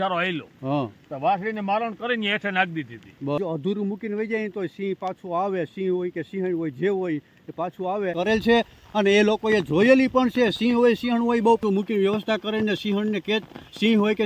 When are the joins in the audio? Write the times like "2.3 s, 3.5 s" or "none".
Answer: 3.4 s, 8.1 s, 11.6 s